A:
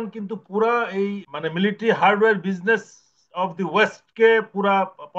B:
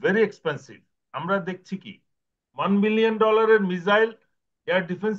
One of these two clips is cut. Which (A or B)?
A